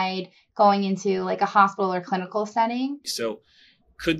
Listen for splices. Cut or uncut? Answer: cut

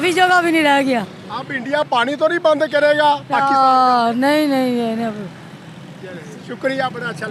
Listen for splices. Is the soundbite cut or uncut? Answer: uncut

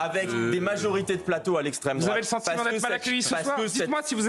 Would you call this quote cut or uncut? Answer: uncut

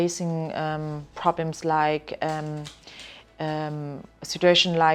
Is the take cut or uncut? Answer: uncut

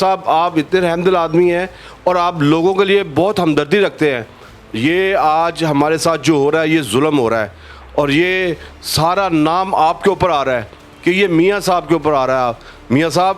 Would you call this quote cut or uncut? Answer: uncut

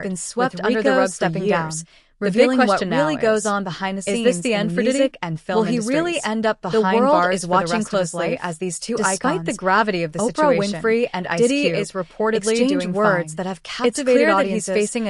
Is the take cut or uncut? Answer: uncut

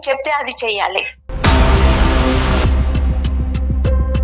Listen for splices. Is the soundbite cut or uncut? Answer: cut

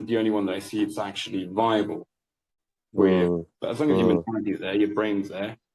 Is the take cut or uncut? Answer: cut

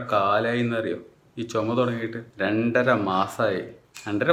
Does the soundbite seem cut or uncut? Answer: uncut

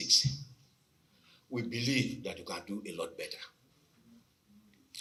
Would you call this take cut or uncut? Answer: uncut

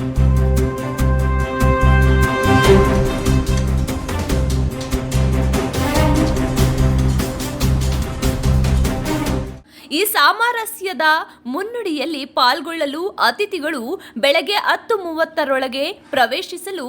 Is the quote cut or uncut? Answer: cut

